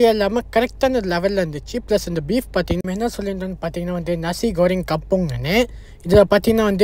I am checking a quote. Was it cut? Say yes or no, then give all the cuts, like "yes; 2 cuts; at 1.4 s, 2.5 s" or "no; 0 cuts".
yes; 1 cut; at 2.8 s